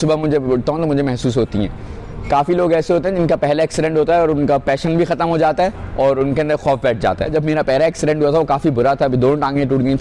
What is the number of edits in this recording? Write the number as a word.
one